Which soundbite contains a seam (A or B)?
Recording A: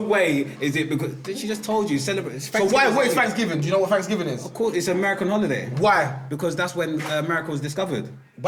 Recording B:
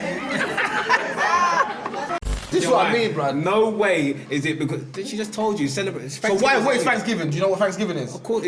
B